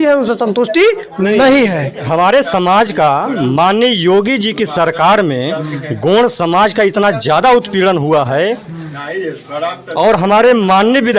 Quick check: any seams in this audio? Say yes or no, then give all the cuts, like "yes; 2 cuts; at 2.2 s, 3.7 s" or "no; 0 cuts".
yes; 1 cut; at 2.1 s